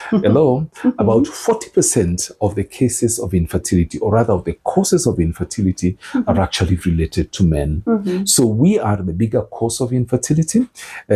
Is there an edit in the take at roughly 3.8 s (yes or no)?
no